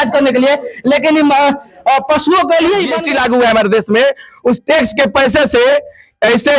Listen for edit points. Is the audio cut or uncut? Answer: cut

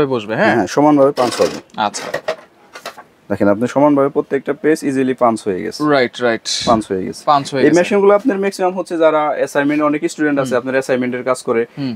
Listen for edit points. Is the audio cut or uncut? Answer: uncut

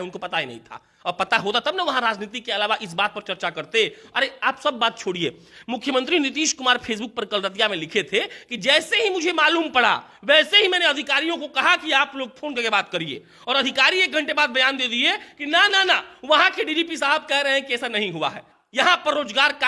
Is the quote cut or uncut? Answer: cut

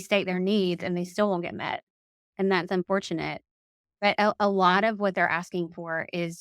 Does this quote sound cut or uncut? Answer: cut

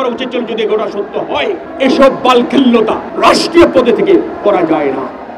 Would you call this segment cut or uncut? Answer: cut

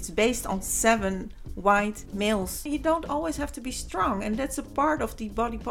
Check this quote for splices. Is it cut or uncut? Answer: cut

